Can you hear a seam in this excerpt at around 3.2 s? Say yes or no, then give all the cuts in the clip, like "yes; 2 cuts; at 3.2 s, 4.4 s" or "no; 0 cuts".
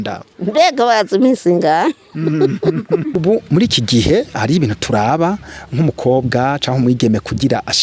yes; 1 cut; at 3.2 s